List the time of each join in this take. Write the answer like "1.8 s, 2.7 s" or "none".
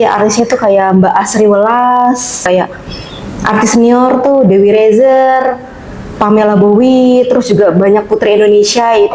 2.4 s